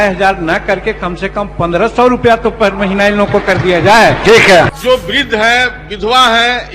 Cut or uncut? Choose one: cut